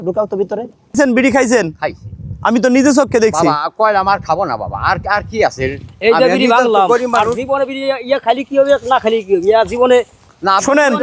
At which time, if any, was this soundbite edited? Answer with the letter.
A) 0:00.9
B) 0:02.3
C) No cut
A